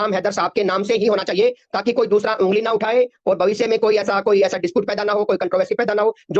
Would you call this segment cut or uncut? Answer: uncut